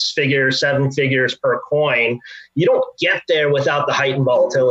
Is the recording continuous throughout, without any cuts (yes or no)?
yes